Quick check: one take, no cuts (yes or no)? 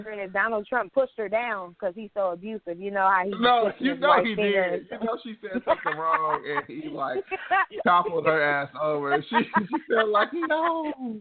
yes